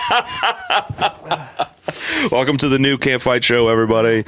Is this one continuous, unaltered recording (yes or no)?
yes